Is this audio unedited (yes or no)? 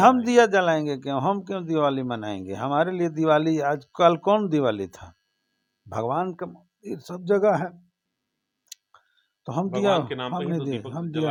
yes